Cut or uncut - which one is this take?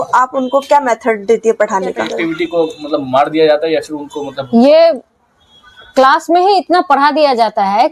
cut